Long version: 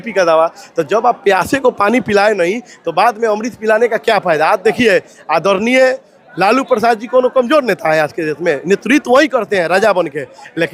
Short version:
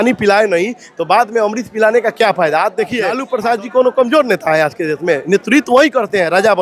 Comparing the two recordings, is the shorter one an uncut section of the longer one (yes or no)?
no